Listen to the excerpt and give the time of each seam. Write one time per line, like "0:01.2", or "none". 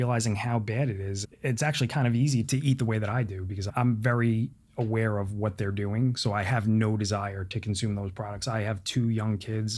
0:01.2
0:02.5
0:03.7